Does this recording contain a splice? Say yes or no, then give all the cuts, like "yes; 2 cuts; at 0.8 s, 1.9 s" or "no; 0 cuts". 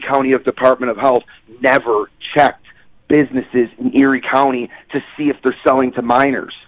no; 0 cuts